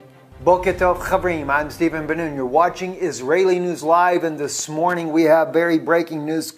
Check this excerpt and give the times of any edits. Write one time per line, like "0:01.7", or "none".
none